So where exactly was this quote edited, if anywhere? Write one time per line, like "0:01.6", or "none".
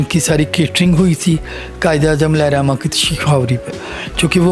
none